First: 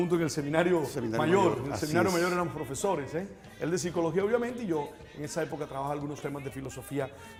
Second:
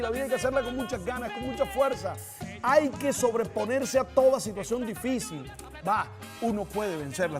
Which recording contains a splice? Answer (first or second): second